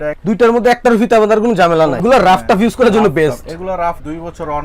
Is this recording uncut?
no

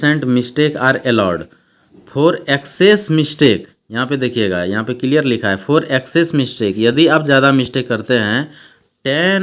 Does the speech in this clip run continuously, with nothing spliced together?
yes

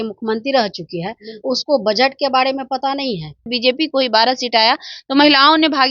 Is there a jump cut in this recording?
yes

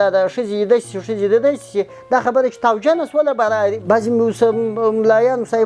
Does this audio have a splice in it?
yes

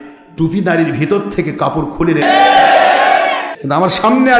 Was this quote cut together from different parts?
yes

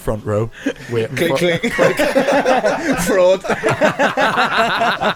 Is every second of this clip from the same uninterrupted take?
yes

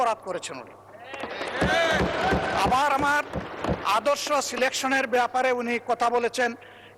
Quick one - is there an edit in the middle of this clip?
no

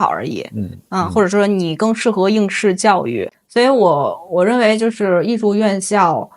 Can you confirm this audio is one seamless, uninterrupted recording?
no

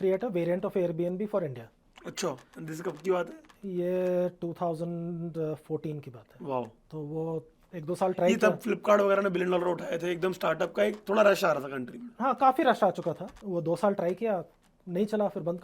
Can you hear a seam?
yes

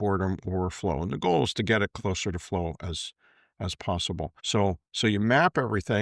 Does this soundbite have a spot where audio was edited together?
yes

